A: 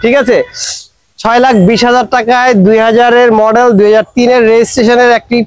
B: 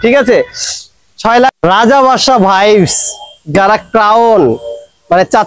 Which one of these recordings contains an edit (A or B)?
B